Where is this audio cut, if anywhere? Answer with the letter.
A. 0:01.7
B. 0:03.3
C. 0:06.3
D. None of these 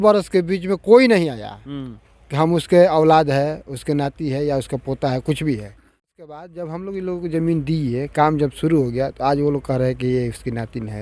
C